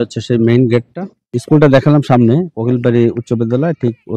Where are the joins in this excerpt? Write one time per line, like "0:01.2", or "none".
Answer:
0:01.4